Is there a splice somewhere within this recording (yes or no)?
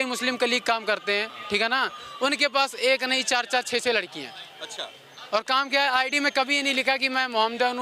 no